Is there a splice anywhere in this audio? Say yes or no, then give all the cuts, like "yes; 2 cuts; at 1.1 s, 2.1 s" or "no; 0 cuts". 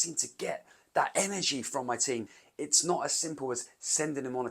yes; 1 cut; at 2.4 s